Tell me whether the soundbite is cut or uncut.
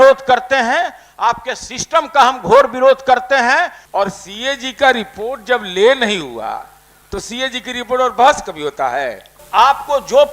cut